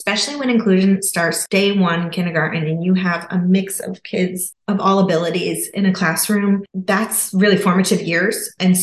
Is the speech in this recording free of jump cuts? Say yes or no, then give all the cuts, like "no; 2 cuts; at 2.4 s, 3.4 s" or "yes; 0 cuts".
no; 1 cut; at 1.4 s